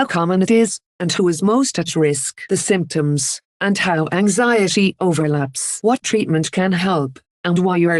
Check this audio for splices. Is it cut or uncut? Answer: cut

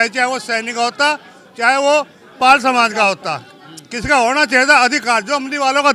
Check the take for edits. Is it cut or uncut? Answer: uncut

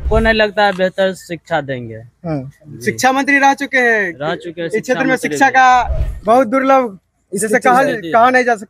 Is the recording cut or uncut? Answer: uncut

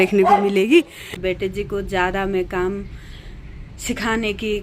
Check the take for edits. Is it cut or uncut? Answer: cut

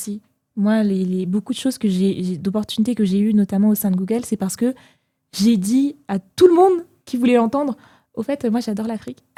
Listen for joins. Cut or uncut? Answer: uncut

